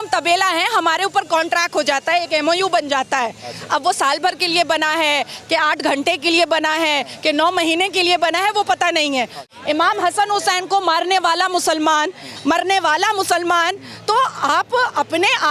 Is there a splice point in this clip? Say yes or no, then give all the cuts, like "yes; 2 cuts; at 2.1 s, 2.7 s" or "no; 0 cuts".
yes; 1 cut; at 9.5 s